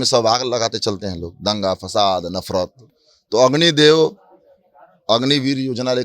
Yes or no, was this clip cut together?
no